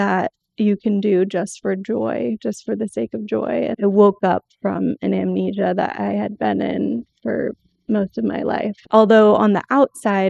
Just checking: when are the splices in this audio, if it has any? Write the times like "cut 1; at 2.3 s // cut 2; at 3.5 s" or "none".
cut 1; at 3.7 s // cut 2; at 8.8 s